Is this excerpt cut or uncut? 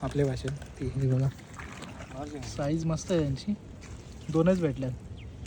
uncut